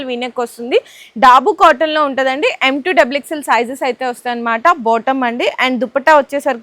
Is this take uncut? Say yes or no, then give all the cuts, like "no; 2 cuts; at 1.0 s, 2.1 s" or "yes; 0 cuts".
yes; 0 cuts